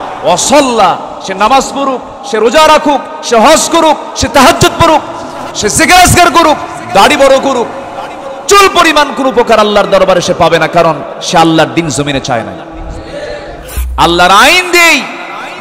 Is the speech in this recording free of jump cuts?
no; 1 cut; at 13.8 s

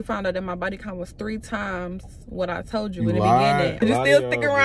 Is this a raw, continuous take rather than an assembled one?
no; 1 cut; at 3.7 s

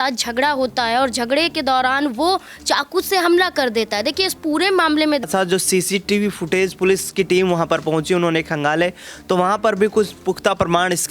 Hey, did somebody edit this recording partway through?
yes; 1 cut; at 5.2 s

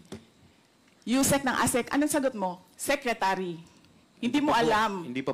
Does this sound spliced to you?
no; 0 cuts

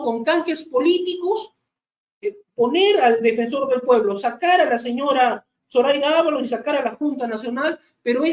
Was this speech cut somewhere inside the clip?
no; 0 cuts

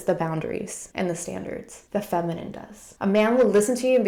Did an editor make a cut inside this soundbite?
no; 0 cuts

